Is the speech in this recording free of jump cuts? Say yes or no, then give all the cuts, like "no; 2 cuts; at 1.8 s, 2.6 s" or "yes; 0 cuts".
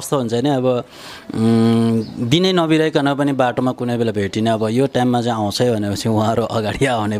yes; 0 cuts